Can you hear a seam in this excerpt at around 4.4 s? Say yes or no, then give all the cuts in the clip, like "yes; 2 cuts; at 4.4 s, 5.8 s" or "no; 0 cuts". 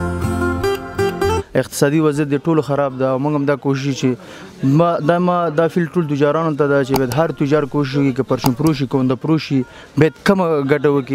no; 1 cut; at 1.4 s